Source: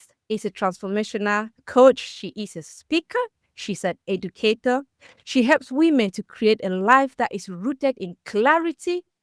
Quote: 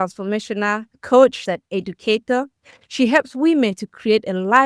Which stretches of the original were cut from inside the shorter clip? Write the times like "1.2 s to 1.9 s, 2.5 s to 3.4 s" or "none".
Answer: 2.0 s to 3.7 s